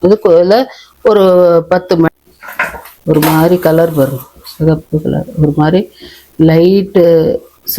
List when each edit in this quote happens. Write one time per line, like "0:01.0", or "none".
0:02.1

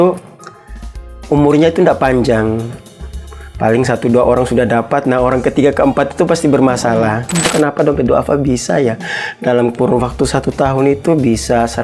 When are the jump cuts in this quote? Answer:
0:07.5

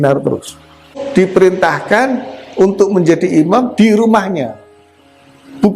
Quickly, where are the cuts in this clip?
0:01.0

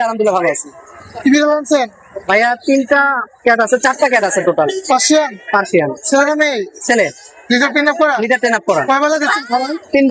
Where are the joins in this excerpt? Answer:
none

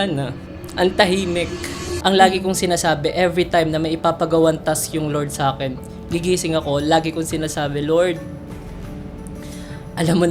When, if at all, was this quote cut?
0:01.8

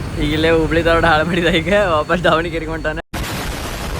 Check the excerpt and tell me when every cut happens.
0:03.0

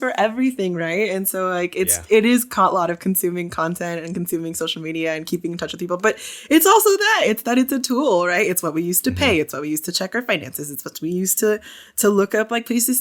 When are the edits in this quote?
none

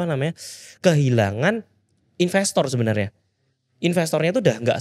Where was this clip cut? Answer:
none

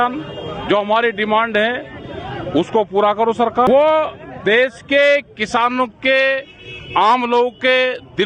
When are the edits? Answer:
0:03.7

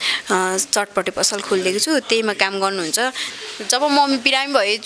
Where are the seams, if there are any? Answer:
0:03.3

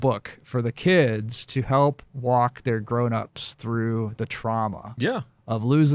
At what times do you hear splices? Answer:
none

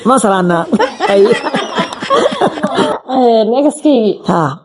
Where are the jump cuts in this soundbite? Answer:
0:02.9

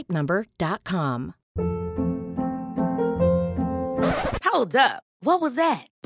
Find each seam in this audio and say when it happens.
0:01.4

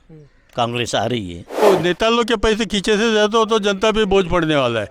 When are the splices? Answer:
0:01.6

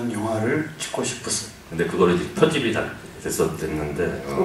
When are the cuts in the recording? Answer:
0:01.6

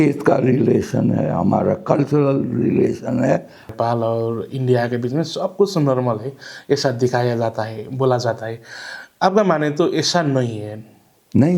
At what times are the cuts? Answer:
0:03.6

